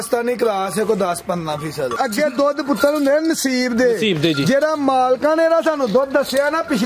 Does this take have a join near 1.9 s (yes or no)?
yes